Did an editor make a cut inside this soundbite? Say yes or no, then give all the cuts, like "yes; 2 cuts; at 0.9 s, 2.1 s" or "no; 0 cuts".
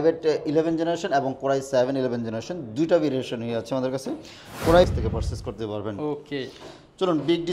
yes; 1 cut; at 4.9 s